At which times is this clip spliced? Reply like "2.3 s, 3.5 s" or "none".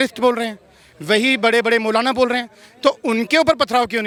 none